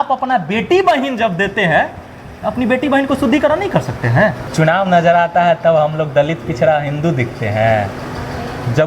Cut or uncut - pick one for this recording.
cut